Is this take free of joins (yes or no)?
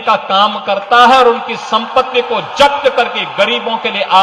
yes